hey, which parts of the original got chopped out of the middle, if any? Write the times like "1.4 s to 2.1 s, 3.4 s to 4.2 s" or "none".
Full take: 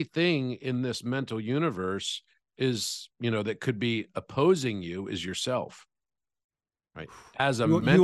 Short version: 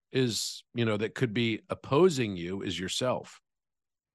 none